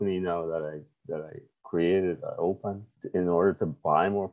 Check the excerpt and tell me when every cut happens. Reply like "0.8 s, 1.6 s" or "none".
none